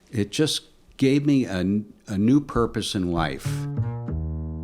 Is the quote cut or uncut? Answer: cut